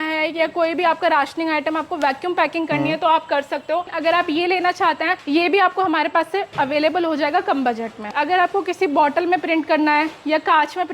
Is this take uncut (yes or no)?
no